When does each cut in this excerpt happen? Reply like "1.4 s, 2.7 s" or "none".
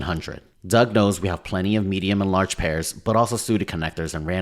none